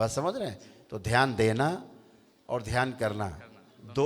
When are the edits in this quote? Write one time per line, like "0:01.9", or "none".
none